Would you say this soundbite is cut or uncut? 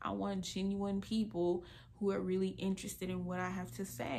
uncut